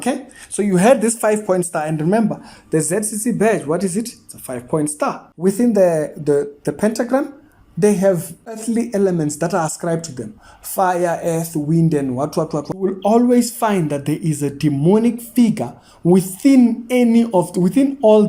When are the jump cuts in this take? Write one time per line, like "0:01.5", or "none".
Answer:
0:05.3
0:08.6
0:12.9